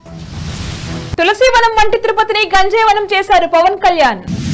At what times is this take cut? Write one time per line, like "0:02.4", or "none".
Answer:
none

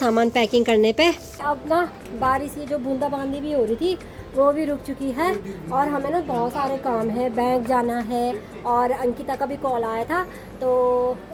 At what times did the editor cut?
none

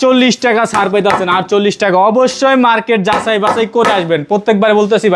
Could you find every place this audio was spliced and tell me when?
none

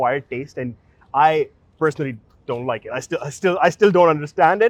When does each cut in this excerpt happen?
none

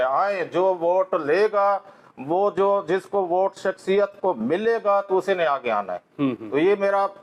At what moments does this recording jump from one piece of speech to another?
none

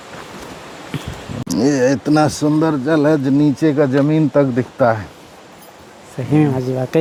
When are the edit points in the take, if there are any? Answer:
none

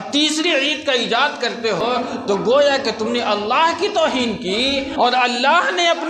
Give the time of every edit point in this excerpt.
0:01.8
0:04.9

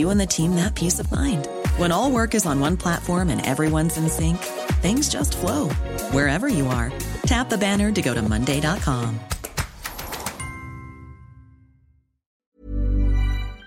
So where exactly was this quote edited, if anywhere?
0:12.5

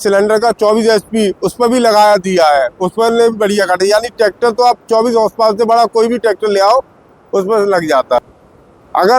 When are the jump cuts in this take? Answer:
0:08.2

